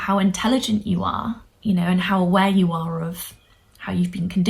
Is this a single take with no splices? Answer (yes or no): no